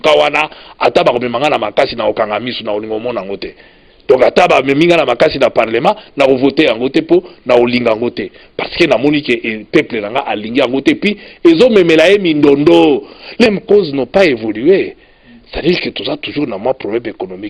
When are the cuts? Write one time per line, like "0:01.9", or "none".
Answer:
0:13.5